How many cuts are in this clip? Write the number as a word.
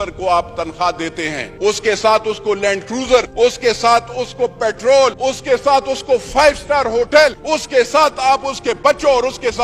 four